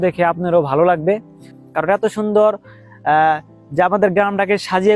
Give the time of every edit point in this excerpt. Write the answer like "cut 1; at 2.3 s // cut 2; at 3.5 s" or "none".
cut 1; at 1.5 s